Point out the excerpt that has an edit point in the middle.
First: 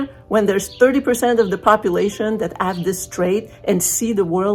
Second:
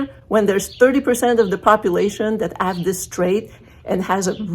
second; 1 cut; at 3.6 s

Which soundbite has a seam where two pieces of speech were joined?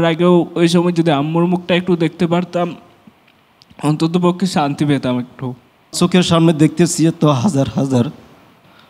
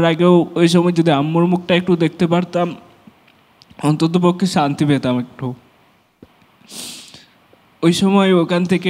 first; 1 cut; at 5.9 s

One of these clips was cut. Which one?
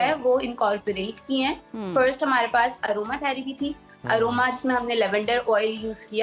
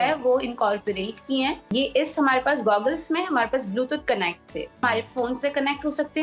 second; 2 cuts; at 1.6 s, 4.8 s

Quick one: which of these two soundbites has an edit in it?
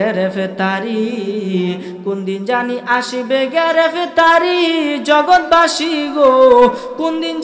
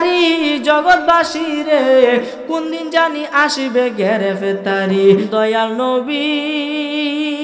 second; 1 cut; at 5.2 s

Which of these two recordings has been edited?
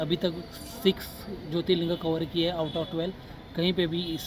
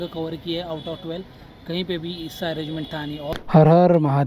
second; 1 cut; at 3.3 s

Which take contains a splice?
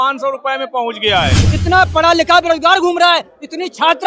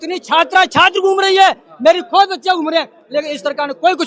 first; 1 cut; at 1.4 s

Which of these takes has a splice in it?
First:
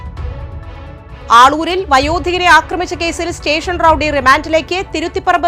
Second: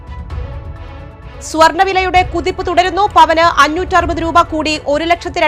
first; 1 cut; at 1.1 s

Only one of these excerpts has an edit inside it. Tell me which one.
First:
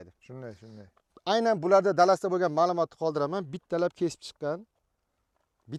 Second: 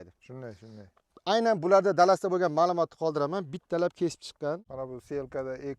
second; 1 cut; at 4.7 s

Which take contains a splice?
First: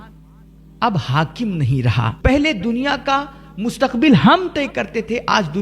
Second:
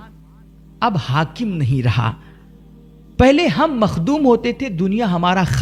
first; 1 cut; at 2.1 s

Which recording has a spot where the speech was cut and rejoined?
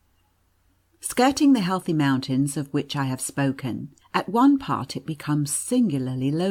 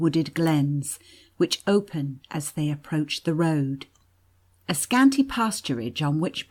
second; 1 cut; at 1.3 s

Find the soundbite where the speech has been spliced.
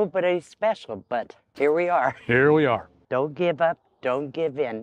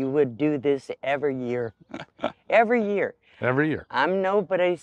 first; 2 cuts; at 1.4 s, 3.0 s

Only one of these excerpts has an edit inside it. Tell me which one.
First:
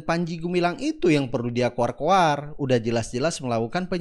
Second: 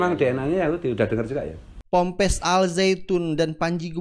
second; 1 cut; at 1.8 s

